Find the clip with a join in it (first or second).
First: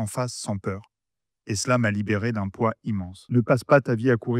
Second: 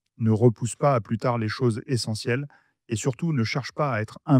first